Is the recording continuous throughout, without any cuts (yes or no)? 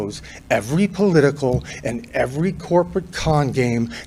yes